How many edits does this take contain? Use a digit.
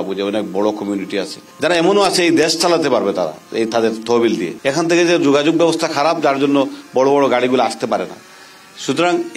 2